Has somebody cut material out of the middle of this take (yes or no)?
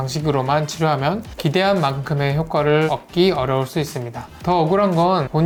no